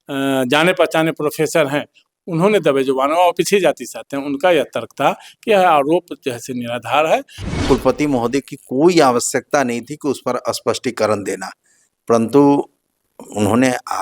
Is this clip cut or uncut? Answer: cut